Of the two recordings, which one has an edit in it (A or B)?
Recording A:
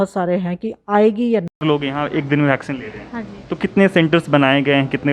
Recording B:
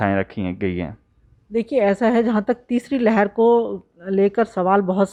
A